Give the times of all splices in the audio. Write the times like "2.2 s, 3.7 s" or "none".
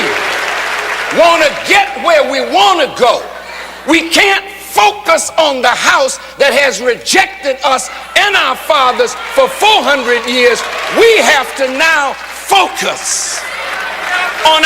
none